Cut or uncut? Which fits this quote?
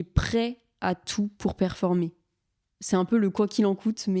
uncut